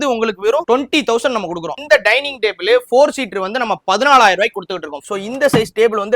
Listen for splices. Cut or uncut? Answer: cut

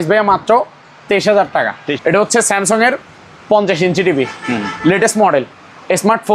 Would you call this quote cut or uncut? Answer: cut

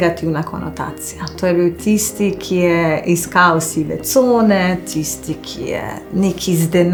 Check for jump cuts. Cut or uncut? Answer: uncut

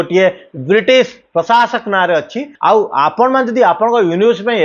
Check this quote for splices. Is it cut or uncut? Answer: cut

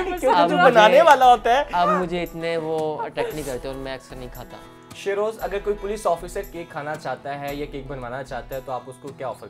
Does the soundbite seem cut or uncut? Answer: uncut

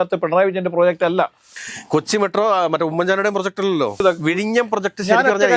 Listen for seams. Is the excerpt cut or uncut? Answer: cut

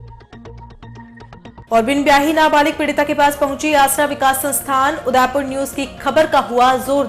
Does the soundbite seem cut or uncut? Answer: cut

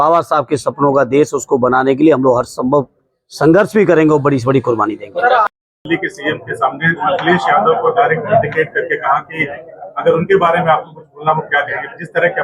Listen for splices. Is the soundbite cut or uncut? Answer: cut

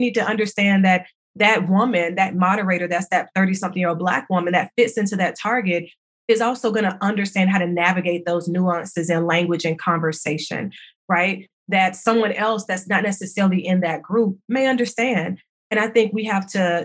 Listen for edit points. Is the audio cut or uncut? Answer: uncut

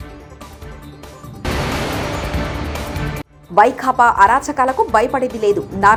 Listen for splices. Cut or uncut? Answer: uncut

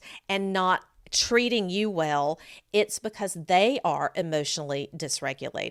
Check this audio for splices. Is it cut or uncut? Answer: uncut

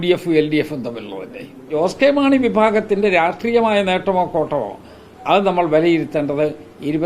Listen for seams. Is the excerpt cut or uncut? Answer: cut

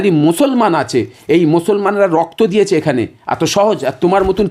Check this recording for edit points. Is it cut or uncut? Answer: uncut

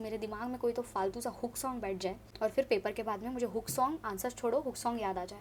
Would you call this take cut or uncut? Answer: uncut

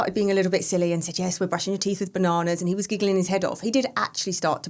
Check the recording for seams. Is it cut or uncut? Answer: uncut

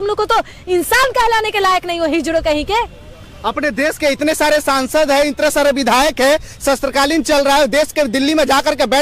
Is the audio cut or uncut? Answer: uncut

